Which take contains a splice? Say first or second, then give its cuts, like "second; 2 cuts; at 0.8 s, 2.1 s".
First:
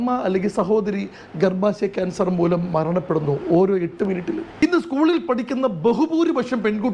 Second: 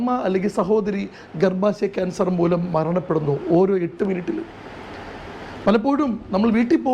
first; 1 cut; at 4.6 s